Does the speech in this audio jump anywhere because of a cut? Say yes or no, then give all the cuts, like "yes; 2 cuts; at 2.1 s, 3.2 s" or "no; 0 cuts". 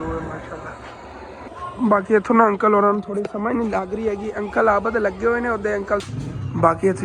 yes; 2 cuts; at 1.5 s, 6.0 s